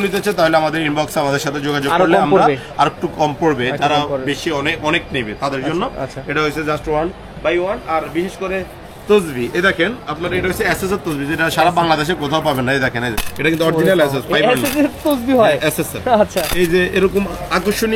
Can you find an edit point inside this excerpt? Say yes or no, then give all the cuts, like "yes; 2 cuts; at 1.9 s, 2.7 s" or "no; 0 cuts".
no; 0 cuts